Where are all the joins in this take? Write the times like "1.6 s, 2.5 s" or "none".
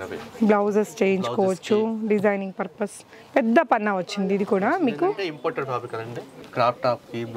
6.4 s